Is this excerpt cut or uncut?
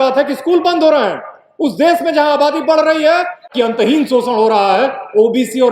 cut